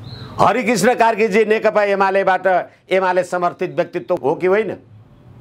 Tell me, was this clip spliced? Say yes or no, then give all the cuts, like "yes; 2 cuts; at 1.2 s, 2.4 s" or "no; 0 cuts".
yes; 1 cut; at 4.2 s